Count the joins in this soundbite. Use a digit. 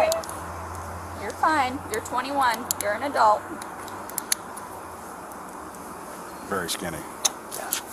0